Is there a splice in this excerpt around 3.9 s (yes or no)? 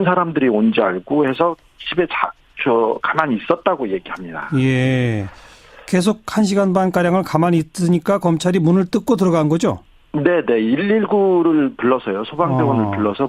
yes